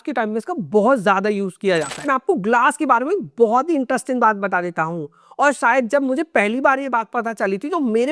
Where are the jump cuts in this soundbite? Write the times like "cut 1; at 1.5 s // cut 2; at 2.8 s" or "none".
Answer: cut 1; at 2.1 s